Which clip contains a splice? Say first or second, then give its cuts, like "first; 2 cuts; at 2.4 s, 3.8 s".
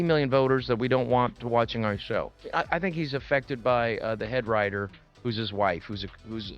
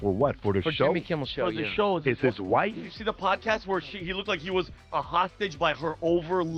first; 1 cut; at 2.5 s